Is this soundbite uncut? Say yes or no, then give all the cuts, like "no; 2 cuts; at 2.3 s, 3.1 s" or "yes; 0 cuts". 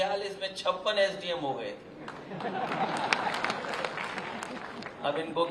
yes; 0 cuts